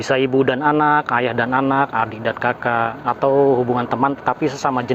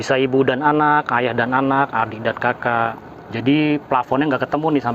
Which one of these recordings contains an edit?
second; 1 cut; at 3.0 s

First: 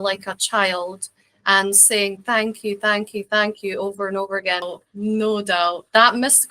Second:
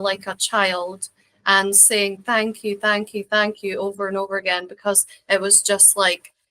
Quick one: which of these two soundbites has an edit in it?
first; 1 cut; at 4.7 s

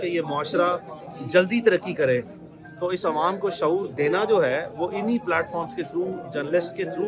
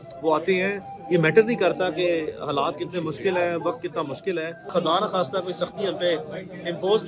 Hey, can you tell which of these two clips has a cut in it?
second; 1 cut; at 4.7 s

